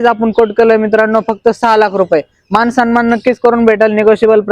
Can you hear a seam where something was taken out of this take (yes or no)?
no